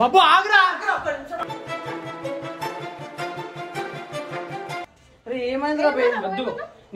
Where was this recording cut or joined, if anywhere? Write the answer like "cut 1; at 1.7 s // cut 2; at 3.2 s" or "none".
cut 1; at 4.8 s